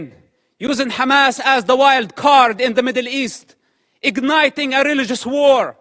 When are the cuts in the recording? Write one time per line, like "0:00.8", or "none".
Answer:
none